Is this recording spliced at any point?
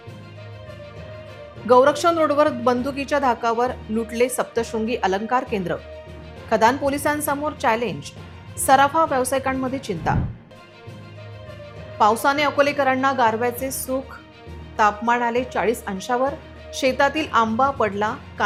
no; 0 cuts

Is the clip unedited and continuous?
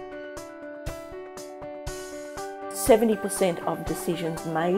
yes; 0 cuts

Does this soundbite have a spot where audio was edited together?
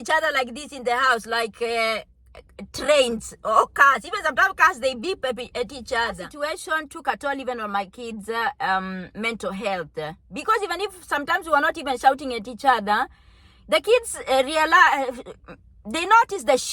yes; 1 cut; at 6.3 s

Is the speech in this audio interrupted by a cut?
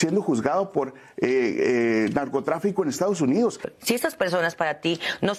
yes; 1 cut; at 3.7 s

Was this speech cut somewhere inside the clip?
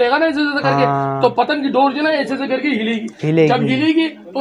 no; 0 cuts

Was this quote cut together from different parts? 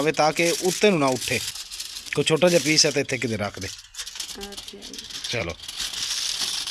yes; 1 cut; at 1.4 s

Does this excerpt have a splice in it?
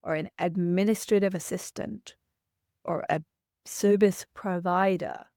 no; 0 cuts

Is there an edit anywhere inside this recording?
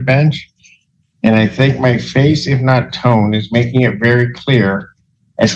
yes; 1 cut; at 2.4 s

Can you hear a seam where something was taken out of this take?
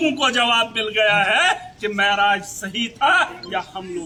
no; 0 cuts

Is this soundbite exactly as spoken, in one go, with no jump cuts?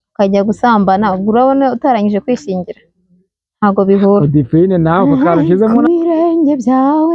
no; 1 cut; at 5.7 s

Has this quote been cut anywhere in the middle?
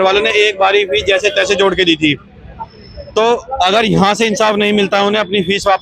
no; 0 cuts

